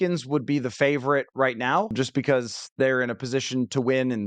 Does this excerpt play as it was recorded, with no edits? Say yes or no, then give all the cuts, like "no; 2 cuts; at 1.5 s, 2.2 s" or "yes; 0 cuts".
no; 1 cut; at 1.9 s